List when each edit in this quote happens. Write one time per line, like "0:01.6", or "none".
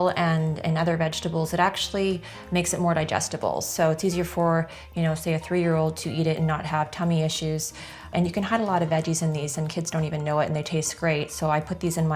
0:08.1